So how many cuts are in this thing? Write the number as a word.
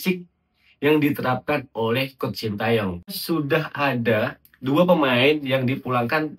one